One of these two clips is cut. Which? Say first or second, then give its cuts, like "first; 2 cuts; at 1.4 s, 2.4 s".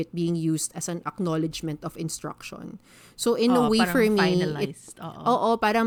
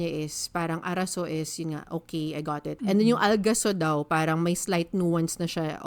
second; 1 cut; at 2.7 s